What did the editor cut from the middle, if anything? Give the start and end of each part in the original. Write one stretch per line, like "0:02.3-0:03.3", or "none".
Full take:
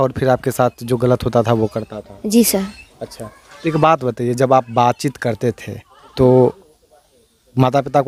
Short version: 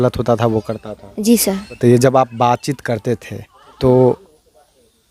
0:02.8-0:04.1